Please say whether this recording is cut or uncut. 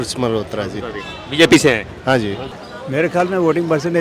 cut